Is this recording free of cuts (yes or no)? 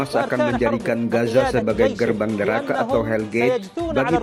yes